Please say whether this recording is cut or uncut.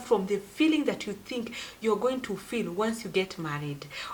uncut